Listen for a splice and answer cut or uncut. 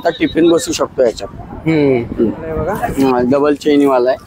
cut